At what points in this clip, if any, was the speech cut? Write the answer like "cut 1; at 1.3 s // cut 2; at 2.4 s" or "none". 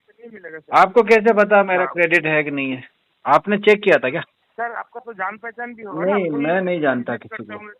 cut 1; at 4.3 s

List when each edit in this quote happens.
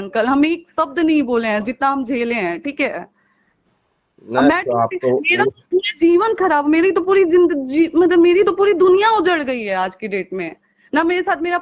none

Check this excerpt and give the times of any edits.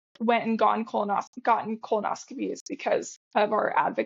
cut 1; at 3.2 s

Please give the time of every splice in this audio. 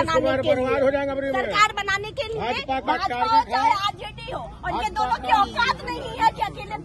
none

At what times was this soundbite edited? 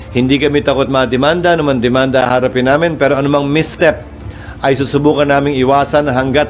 none

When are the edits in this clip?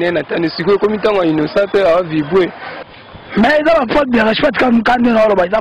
cut 1; at 2.7 s

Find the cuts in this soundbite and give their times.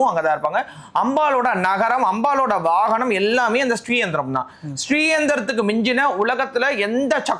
none

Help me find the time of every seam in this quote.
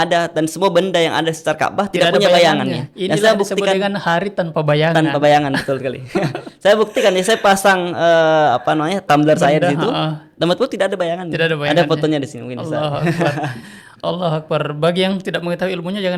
none

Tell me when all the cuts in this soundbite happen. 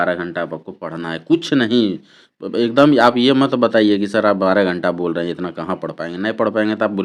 none

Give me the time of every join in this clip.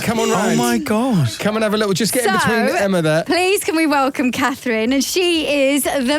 none

